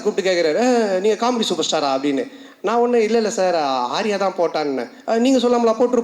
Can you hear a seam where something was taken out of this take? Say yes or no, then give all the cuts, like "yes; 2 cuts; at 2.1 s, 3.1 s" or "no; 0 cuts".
no; 0 cuts